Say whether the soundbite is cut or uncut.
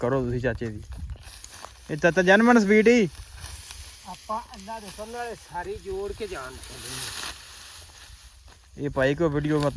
uncut